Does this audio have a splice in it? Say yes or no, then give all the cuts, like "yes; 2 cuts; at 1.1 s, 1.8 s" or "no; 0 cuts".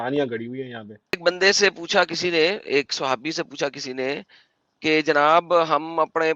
yes; 1 cut; at 1.2 s